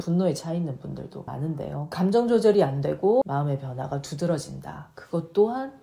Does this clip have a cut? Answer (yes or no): yes